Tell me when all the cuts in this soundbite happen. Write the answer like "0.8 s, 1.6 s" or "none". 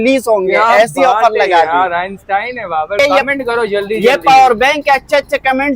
3.0 s